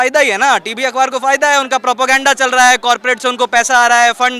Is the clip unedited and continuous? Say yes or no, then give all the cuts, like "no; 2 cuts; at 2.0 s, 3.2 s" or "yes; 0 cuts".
yes; 0 cuts